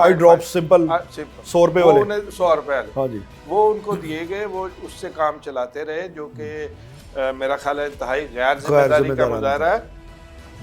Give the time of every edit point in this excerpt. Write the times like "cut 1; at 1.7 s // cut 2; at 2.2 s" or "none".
none